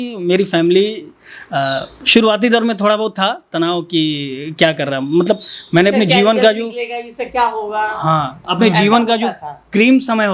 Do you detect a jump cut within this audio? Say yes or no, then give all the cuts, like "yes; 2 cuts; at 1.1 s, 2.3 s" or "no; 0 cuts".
no; 0 cuts